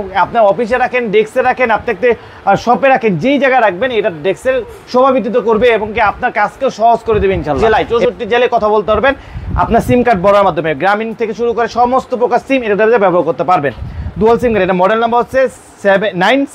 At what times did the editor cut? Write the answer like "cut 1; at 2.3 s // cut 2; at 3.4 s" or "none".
cut 1; at 7.9 s